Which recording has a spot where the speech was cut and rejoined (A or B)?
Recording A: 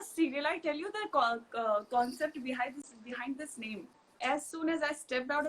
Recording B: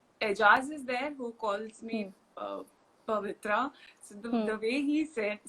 A